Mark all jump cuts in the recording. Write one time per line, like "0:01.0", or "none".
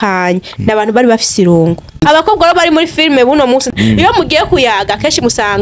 0:02.0
0:03.7